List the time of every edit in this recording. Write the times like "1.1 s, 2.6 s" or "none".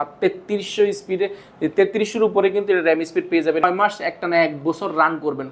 3.6 s